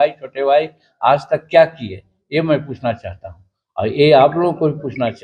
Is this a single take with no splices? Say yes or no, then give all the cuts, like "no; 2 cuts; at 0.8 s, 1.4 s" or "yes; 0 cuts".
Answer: yes; 0 cuts